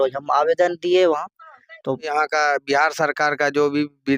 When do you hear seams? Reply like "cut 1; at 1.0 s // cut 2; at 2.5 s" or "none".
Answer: cut 1; at 2.1 s